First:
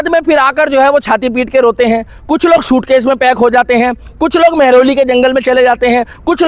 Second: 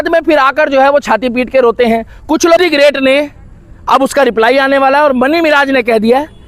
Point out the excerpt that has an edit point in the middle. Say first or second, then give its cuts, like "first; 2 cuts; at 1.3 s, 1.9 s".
second; 1 cut; at 2.6 s